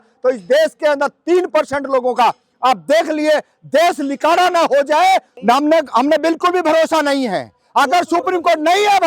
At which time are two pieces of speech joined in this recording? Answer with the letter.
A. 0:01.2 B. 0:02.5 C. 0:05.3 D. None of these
C